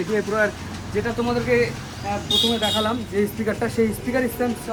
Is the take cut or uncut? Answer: uncut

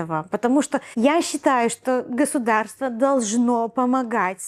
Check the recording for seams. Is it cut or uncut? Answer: uncut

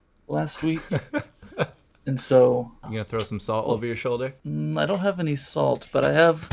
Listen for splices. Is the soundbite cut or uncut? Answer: cut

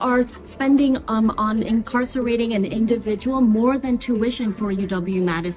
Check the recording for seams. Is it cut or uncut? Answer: uncut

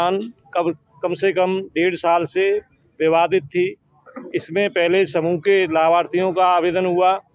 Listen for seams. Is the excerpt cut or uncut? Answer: uncut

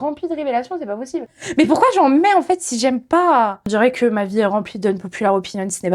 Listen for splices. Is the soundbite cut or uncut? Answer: cut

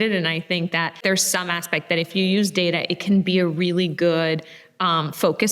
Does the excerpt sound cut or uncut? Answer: cut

